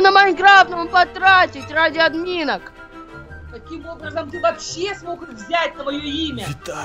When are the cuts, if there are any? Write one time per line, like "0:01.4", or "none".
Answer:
none